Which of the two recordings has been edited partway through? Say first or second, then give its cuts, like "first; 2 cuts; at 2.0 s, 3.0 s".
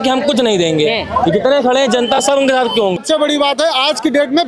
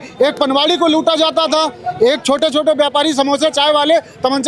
first; 1 cut; at 3.0 s